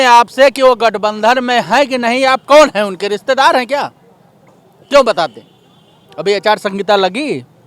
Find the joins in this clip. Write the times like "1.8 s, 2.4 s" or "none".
none